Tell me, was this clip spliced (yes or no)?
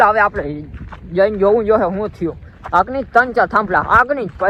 no